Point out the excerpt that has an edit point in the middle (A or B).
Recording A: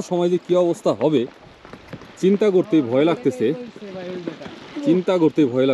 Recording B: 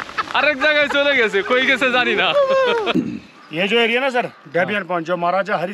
B